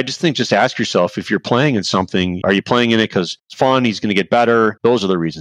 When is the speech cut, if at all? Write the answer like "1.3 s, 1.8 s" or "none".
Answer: 3.5 s